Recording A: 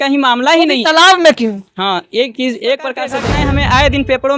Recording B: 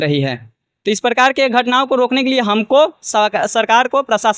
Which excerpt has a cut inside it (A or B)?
A